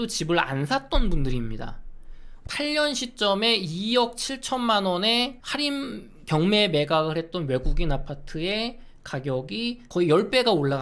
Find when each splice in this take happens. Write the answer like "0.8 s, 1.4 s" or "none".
2.5 s, 9.9 s